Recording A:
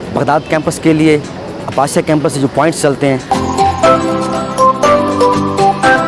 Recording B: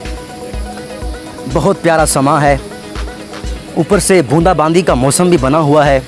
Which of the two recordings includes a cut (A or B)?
A